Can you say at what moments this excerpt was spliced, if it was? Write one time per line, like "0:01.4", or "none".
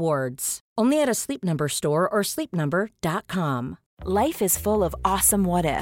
0:03.8